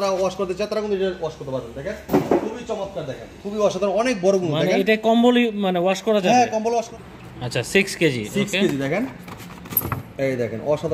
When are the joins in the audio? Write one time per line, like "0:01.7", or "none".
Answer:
0:06.9